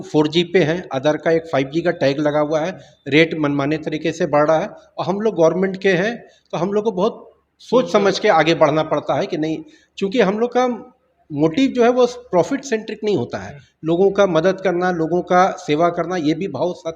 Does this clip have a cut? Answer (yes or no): no